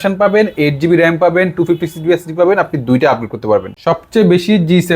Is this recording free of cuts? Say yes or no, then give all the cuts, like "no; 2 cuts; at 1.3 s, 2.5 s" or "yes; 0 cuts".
no; 1 cut; at 3.7 s